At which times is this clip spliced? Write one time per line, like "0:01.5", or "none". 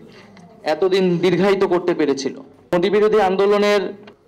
0:02.7